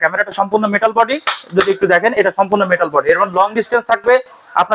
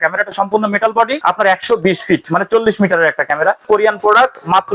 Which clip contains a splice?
second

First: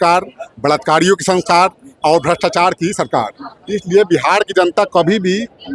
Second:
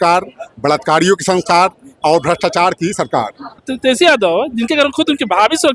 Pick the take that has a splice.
second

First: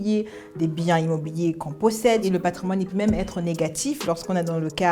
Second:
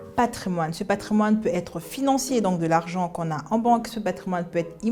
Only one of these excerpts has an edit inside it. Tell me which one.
first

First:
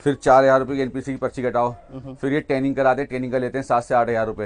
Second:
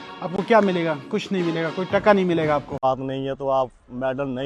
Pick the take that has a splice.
second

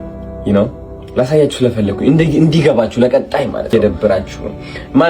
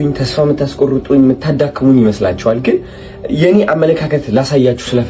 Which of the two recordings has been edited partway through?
first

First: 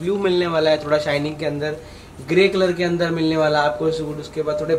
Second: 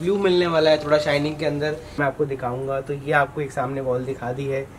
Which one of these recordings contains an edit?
second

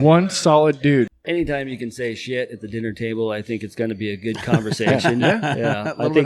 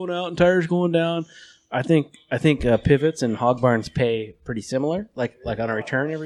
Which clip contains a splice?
first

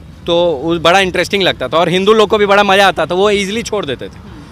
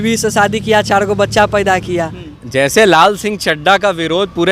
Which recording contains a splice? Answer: second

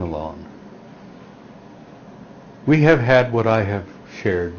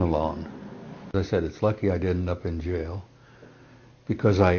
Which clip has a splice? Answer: second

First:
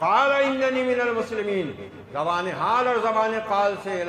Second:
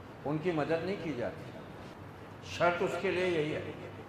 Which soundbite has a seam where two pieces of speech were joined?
second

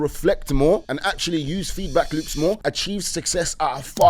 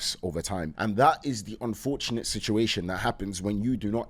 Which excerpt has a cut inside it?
first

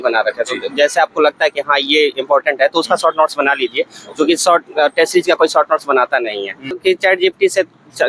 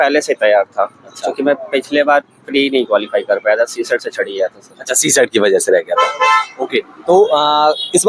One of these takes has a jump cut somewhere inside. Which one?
first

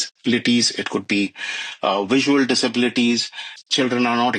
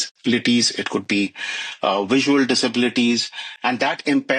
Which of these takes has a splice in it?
first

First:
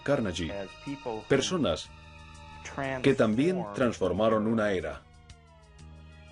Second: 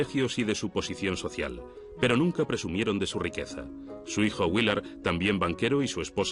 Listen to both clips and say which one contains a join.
first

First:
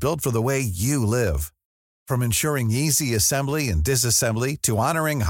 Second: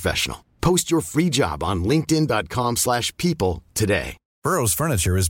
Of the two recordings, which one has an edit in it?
second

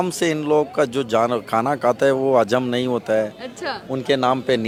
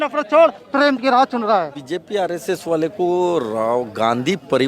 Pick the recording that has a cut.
second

